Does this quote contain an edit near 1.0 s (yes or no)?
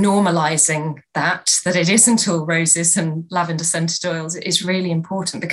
no